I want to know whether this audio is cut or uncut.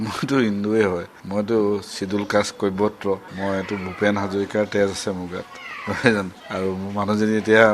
cut